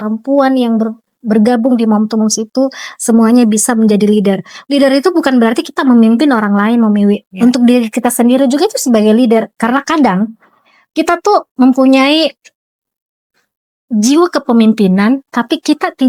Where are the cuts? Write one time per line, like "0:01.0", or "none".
none